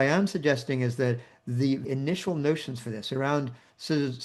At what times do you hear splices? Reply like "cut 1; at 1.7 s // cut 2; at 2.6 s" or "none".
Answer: cut 1; at 1.9 s